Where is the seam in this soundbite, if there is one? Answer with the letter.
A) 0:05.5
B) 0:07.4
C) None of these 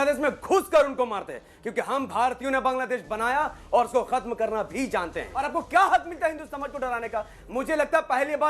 A